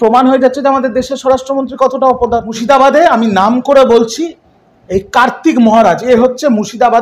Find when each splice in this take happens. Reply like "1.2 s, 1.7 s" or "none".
2.5 s